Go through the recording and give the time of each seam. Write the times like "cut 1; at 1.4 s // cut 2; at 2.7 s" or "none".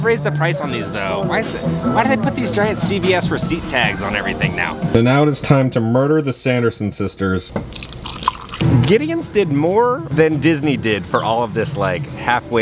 cut 1; at 4.9 s // cut 2; at 8.6 s